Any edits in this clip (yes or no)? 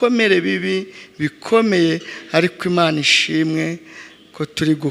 no